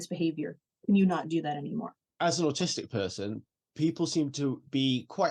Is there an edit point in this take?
yes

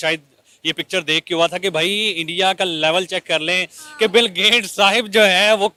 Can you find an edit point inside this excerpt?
no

